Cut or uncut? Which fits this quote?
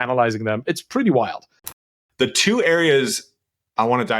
cut